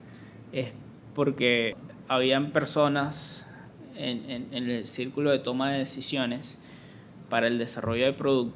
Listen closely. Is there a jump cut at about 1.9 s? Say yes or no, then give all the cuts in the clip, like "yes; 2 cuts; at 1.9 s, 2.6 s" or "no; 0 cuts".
yes; 1 cut; at 1.9 s